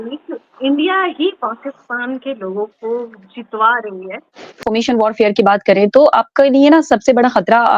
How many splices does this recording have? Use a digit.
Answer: 1